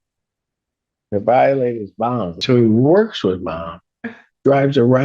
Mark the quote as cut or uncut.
cut